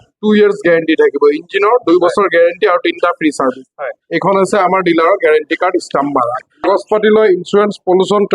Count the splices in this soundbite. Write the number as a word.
one